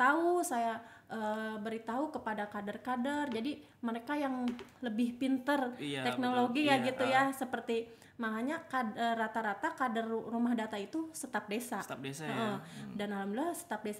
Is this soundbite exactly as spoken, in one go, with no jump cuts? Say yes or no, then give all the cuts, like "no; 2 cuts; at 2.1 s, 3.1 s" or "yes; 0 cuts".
yes; 0 cuts